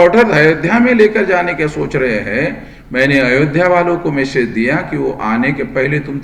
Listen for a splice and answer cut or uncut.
uncut